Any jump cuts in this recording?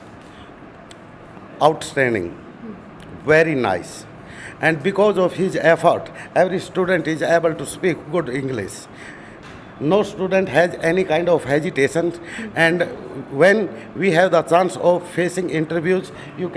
no; 0 cuts

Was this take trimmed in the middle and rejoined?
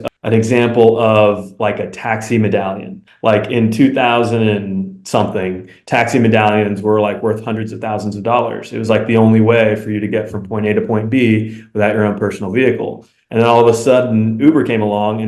no; 0 cuts

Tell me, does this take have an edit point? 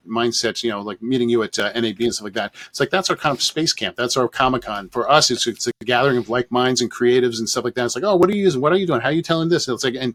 no; 0 cuts

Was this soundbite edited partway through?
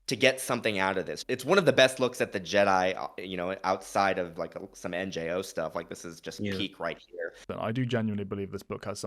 yes; 3 cuts; at 1.2 s, 4.3 s, 7.5 s

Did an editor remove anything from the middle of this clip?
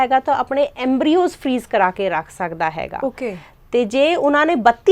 no; 0 cuts

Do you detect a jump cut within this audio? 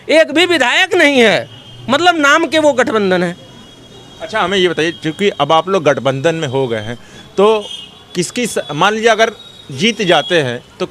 no; 0 cuts

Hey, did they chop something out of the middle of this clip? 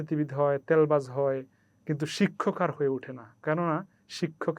no; 0 cuts

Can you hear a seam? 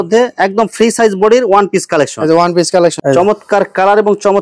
yes; 1 cut; at 3.0 s

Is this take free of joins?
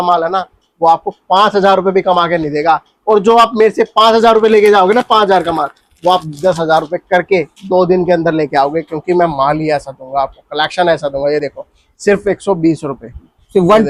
yes; 0 cuts

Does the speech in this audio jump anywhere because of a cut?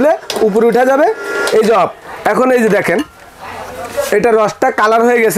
no; 0 cuts

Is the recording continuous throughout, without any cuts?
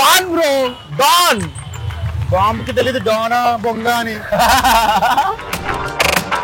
yes; 0 cuts

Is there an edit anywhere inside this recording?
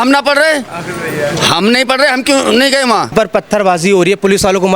yes; 1 cut; at 3.1 s

